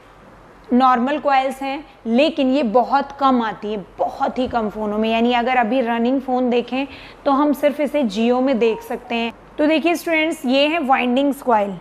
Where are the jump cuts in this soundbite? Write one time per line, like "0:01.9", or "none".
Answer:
0:09.4